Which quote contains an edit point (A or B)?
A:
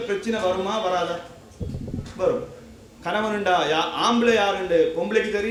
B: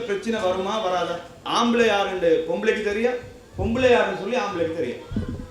B